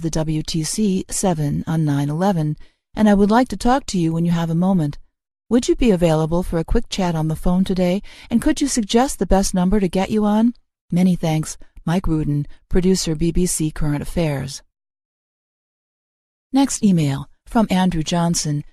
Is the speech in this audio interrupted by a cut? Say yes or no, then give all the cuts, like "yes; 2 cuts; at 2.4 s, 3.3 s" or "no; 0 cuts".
yes; 1 cut; at 5.6 s